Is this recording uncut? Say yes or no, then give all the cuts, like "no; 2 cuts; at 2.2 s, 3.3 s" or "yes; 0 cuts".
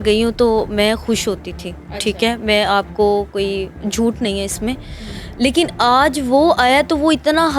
yes; 0 cuts